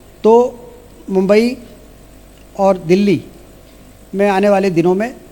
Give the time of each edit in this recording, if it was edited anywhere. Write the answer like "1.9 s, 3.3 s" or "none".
none